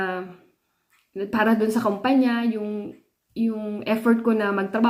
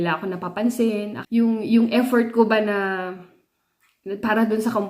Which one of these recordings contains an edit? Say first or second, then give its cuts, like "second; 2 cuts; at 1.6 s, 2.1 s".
second; 1 cut; at 1.2 s